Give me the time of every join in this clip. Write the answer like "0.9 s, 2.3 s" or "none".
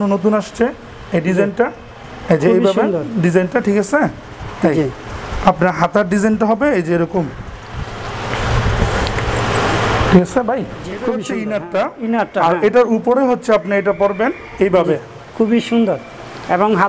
11.1 s